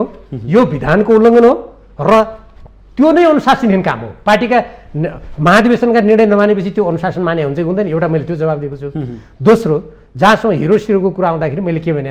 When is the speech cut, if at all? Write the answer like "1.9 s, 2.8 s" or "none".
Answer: none